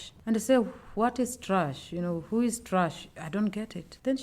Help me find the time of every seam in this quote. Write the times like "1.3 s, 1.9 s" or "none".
none